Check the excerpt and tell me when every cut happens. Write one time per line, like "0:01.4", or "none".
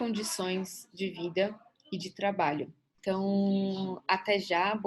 0:02.9